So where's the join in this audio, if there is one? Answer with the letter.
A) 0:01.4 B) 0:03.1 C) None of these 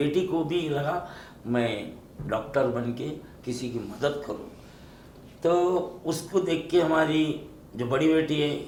C